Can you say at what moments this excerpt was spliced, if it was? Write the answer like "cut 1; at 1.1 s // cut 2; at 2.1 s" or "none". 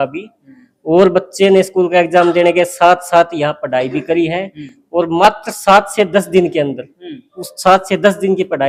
none